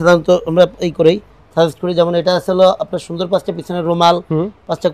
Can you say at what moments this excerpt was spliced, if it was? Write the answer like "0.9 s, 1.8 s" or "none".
none